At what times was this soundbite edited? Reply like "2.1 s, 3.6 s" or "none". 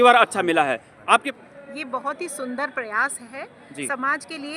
1.3 s